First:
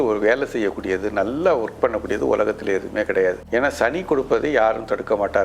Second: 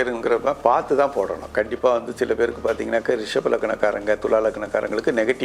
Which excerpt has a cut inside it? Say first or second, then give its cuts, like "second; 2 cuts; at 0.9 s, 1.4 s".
first; 1 cut; at 3.4 s